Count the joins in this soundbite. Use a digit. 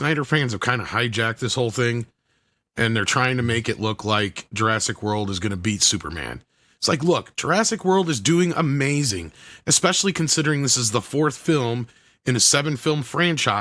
0